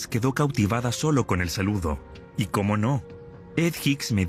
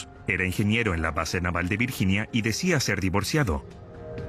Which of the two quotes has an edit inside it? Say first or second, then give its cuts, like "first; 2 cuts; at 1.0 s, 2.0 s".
second; 1 cut; at 2.0 s